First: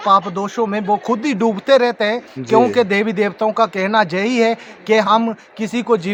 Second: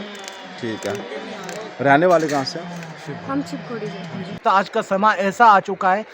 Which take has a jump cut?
second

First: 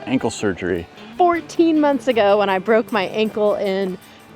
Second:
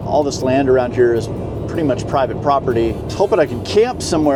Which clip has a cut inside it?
first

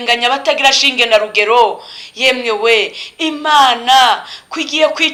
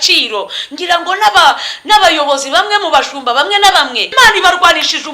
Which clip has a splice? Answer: second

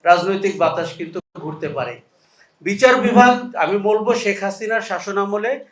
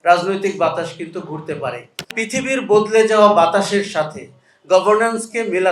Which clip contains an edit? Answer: second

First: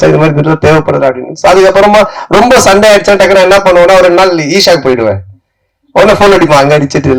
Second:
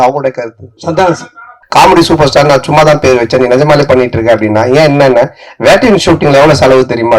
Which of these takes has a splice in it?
second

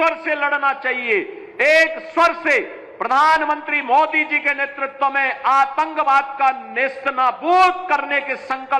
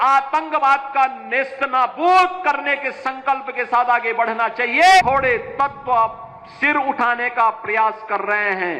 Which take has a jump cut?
second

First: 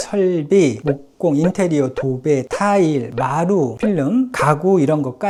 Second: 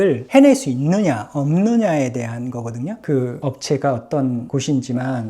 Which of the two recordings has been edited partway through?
second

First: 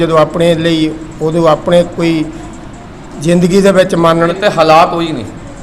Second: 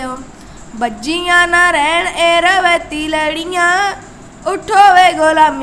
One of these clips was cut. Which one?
first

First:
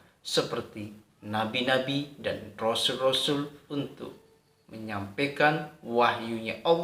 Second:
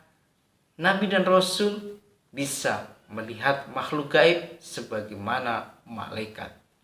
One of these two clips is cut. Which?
first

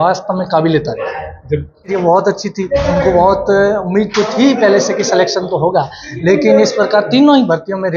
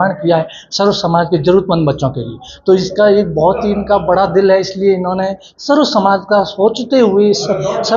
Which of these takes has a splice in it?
first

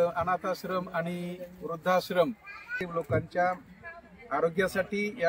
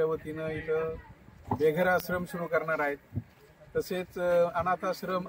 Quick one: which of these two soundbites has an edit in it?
first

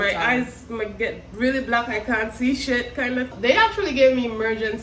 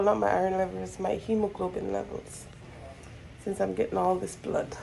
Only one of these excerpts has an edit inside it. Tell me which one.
first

